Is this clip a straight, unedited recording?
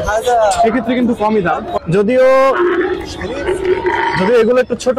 no; 1 cut; at 1.8 s

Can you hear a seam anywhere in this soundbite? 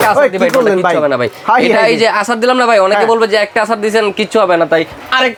no; 0 cuts

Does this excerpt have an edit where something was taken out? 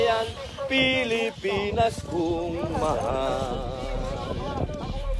no; 0 cuts

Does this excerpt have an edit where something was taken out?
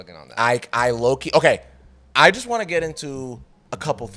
yes; 1 cut; at 2.0 s

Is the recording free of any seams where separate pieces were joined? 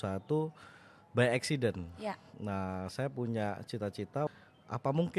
no; 1 cut; at 4.3 s

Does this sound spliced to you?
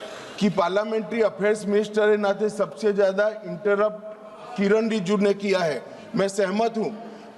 no; 0 cuts

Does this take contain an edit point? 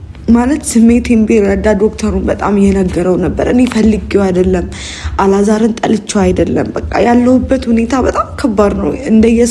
no; 0 cuts

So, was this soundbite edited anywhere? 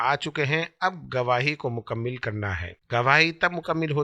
yes; 1 cut; at 2.7 s

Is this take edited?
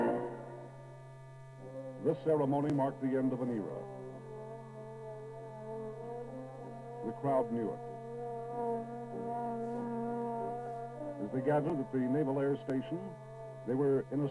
yes; 1 cut; at 9.7 s

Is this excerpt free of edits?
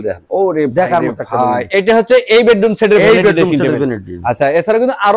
yes; 0 cuts

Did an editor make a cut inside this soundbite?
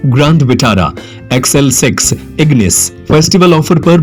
no; 0 cuts

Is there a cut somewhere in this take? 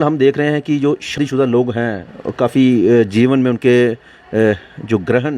yes; 1 cut; at 1.2 s

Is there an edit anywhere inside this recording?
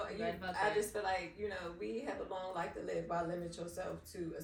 no; 0 cuts

